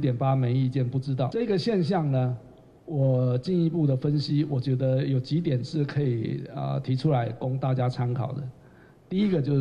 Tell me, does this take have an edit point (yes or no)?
yes